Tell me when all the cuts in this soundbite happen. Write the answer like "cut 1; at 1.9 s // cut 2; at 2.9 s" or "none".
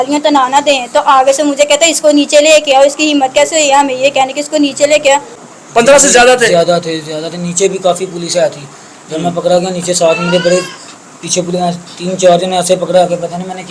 cut 1; at 5.4 s

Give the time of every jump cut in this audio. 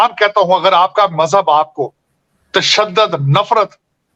none

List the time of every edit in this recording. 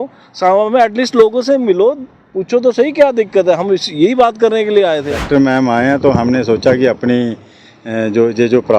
cut 1; at 5.2 s

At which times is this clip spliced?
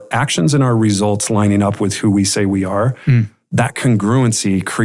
none

